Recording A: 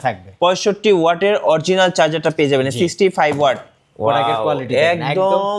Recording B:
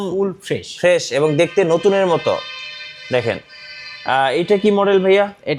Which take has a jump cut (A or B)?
A